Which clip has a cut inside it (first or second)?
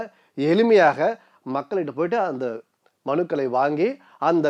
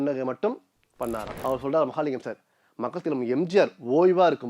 second